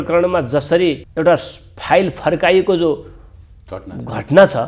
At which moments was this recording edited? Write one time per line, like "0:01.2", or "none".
0:01.0